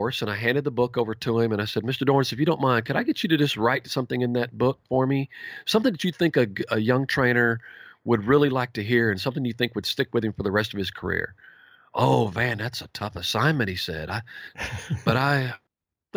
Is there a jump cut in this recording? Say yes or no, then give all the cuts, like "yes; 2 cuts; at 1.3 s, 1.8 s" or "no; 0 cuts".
no; 0 cuts